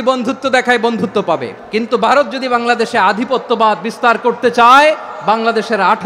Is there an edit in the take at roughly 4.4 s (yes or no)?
no